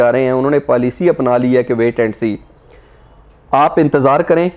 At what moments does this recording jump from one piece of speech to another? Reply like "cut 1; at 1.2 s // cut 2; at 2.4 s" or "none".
none